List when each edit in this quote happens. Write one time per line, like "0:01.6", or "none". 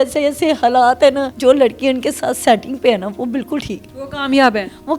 0:01.3